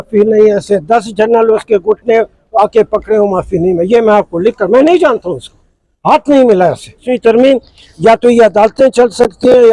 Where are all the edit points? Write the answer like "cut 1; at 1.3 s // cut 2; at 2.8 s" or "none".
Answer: cut 1; at 7.1 s